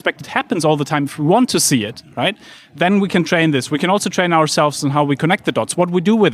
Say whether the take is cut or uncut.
uncut